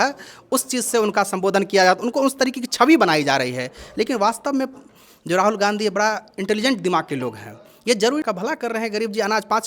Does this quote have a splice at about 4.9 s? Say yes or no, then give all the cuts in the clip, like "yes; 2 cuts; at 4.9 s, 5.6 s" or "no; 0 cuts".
no; 1 cut; at 8.2 s